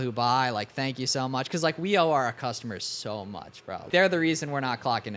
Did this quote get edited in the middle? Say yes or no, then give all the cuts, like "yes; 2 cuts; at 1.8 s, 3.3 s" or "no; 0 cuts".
yes; 1 cut; at 3.9 s